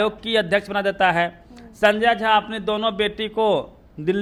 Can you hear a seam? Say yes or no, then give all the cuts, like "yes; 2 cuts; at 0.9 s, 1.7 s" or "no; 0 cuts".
no; 0 cuts